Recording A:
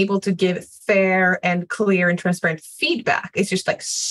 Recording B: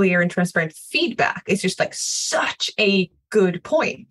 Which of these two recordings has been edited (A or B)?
B